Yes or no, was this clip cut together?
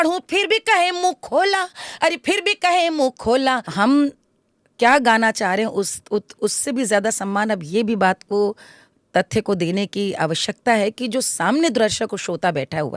yes